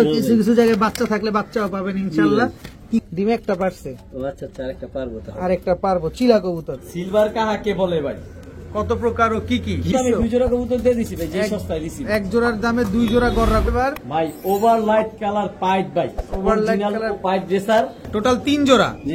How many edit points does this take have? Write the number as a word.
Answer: five